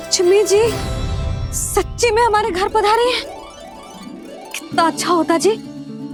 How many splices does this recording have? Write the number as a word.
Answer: zero